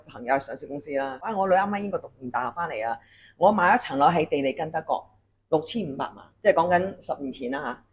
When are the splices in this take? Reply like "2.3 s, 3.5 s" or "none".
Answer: 1.2 s